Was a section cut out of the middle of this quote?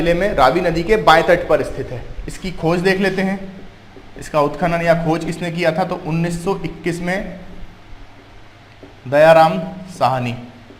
no; 0 cuts

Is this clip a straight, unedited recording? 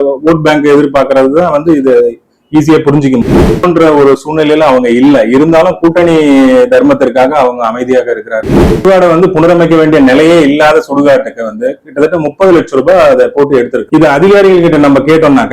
no; 2 cuts; at 3.5 s, 8.8 s

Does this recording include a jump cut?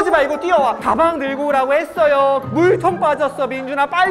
yes; 2 cuts; at 0.8 s, 2.5 s

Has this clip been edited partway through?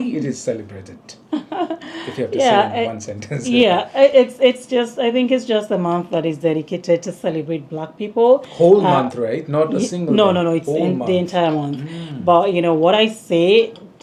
no; 0 cuts

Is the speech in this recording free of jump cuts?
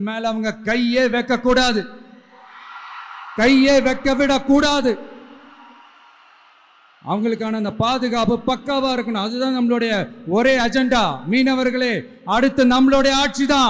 yes; 0 cuts

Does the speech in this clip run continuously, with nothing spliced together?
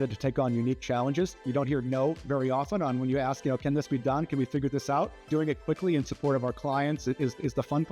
no; 2 cuts; at 1.4 s, 5.2 s

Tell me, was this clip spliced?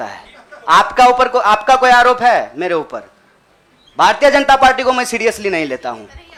no; 0 cuts

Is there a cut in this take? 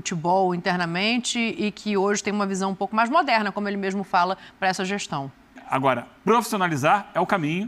yes; 1 cut; at 5.6 s

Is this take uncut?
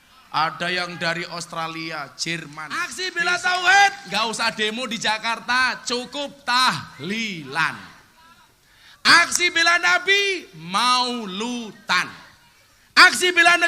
no; 1 cut; at 3.0 s

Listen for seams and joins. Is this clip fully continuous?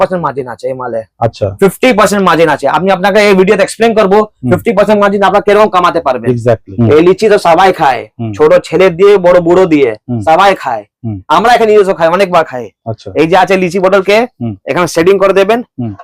no; 1 cut; at 6.7 s

